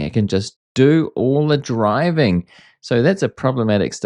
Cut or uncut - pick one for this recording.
uncut